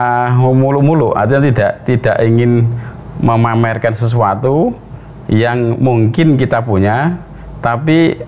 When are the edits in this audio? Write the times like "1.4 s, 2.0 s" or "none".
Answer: none